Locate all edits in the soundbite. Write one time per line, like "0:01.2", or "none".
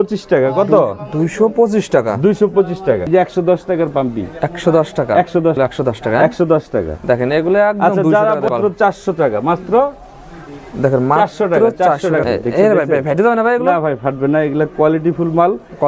0:03.0
0:05.6
0:08.5
0:12.2